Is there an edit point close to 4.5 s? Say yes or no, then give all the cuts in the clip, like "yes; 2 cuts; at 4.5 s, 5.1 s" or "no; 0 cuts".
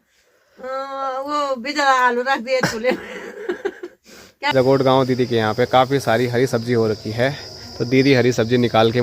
yes; 1 cut; at 4.5 s